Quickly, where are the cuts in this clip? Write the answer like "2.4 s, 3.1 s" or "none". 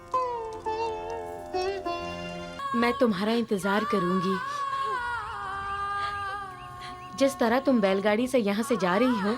2.6 s

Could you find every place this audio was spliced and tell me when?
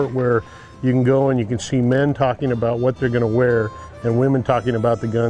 3.8 s

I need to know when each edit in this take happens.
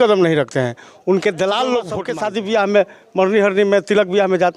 2.0 s

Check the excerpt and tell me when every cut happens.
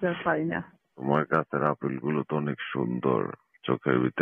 0.9 s

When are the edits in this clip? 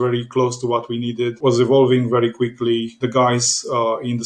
1.4 s, 2.9 s

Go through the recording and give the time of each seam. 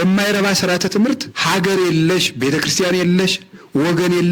1.3 s

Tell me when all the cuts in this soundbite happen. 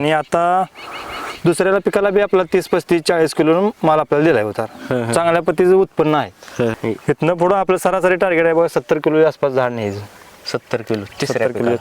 6.8 s

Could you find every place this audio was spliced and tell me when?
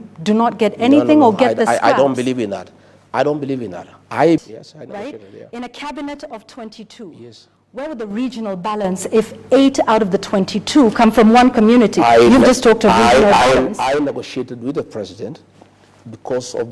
4.4 s

